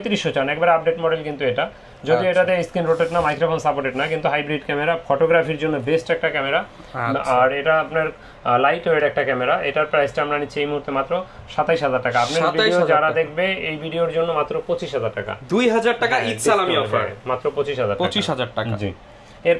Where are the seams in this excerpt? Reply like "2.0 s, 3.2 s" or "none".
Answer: none

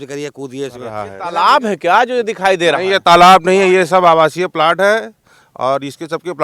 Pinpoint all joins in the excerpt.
1.1 s

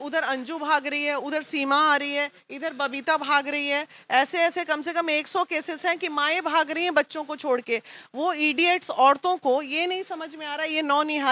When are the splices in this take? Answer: none

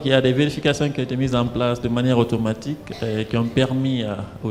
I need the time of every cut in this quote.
none

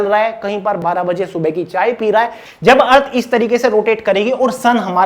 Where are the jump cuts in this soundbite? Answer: 0.8 s, 2.4 s

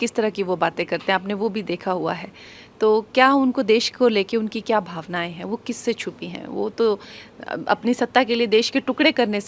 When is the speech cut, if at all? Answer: none

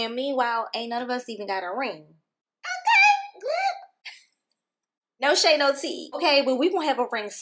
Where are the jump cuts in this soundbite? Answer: 5.2 s, 6.2 s

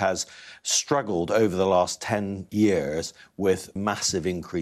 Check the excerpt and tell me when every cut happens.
2.4 s, 3.8 s

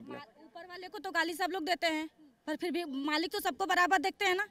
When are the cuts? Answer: none

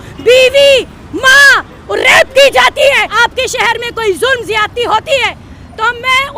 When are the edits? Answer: 3.1 s

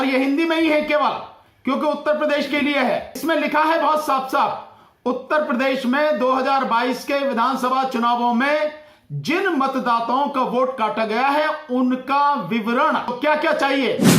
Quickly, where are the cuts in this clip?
3.2 s, 13.1 s

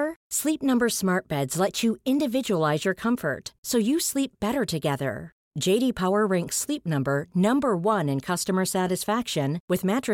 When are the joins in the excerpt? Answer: none

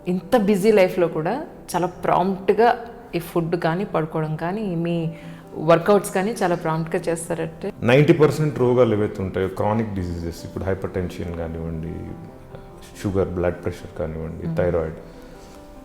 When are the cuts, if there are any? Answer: 7.6 s

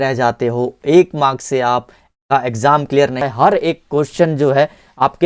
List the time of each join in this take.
3.2 s

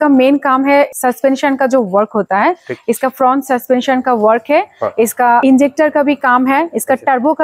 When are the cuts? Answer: 0.9 s, 5.4 s

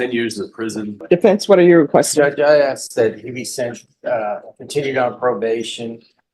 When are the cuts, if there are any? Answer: 1.0 s

